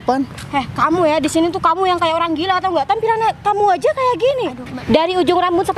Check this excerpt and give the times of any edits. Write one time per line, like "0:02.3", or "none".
0:04.8